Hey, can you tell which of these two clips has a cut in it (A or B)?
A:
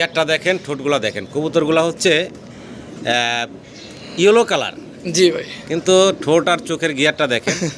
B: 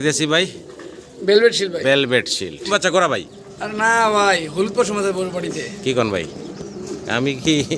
B